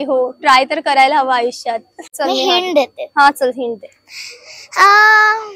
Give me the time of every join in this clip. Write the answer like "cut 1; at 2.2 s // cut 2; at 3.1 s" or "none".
cut 1; at 2.0 s

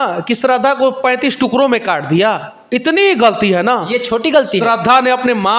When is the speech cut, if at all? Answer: none

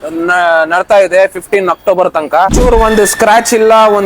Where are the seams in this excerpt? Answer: cut 1; at 2.6 s

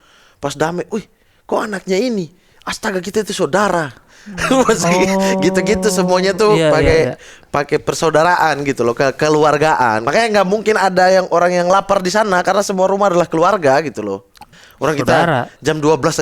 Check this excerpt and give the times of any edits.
cut 1; at 10.0 s // cut 2; at 14.5 s

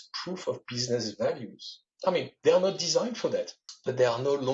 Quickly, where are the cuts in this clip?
cut 1; at 3.6 s

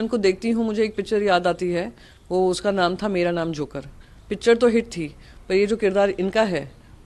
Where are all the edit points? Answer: none

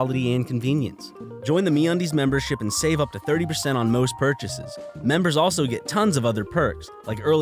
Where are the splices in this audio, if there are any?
cut 1; at 1.3 s

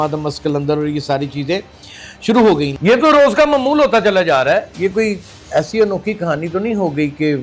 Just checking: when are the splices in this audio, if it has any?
cut 1; at 2.8 s

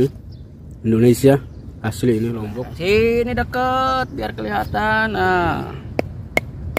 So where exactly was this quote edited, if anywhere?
cut 1; at 2.4 s

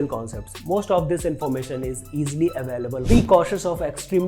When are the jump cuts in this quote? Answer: cut 1; at 3.2 s

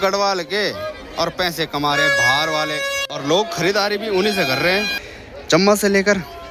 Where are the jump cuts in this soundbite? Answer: cut 1; at 3.1 s // cut 2; at 5.1 s

